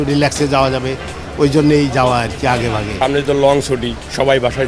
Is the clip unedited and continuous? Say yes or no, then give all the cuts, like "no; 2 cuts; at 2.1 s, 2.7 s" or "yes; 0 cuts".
no; 1 cut; at 2.9 s